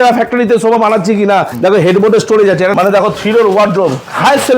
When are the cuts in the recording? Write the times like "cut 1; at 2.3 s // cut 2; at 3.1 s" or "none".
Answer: cut 1; at 1.5 s // cut 2; at 2.7 s